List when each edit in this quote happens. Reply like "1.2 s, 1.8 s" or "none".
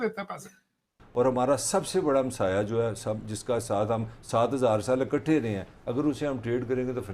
1.0 s

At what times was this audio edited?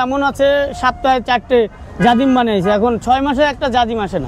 none

